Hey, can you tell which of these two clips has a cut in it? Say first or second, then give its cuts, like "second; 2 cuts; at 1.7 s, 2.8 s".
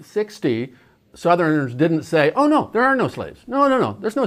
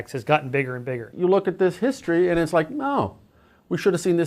second; 1 cut; at 1.1 s